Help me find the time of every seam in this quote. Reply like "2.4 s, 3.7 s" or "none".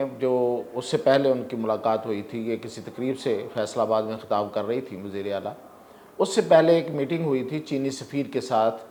none